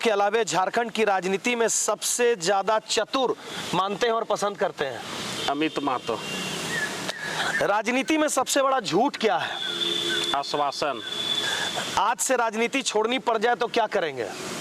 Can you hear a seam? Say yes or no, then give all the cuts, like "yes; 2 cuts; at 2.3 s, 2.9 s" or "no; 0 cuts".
no; 0 cuts